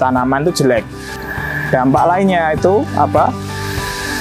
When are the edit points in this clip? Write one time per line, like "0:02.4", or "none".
0:01.0